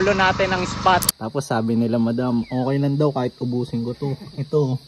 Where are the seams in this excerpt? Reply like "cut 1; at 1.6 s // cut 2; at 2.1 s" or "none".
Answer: cut 1; at 1.2 s